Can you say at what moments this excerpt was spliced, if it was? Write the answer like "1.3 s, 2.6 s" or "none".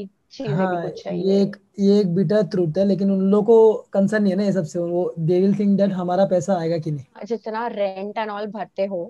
7.2 s